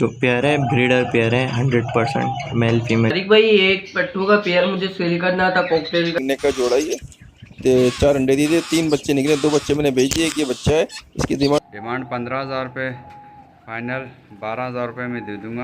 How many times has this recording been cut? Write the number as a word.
three